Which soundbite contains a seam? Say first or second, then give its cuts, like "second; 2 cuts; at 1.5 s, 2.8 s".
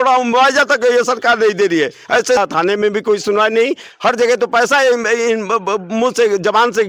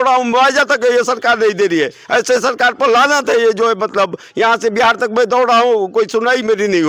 first; 1 cut; at 2.4 s